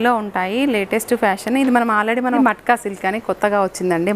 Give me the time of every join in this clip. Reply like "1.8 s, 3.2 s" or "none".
2.4 s